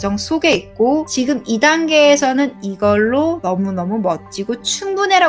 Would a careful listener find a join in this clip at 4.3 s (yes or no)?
no